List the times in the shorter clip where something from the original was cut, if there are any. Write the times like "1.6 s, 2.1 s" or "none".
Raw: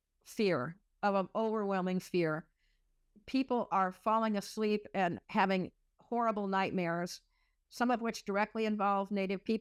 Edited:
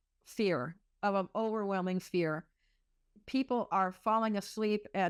none